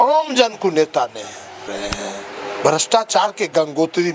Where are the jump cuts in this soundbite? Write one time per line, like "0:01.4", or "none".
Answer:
0:01.7